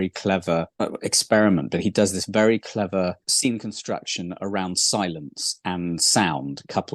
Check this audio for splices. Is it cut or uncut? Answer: uncut